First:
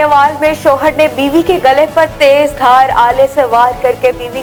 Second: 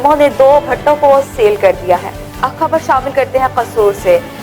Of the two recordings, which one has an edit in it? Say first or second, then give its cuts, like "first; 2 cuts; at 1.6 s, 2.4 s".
second; 1 cut; at 2.1 s